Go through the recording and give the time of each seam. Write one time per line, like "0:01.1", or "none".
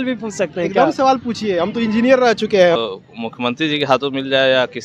0:02.8